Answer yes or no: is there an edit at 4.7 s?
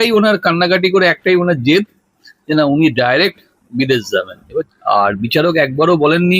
yes